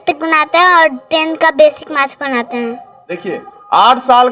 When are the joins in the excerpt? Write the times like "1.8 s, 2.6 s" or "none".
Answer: none